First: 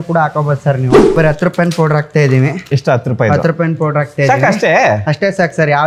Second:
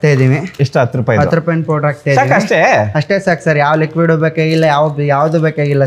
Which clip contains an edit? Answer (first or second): first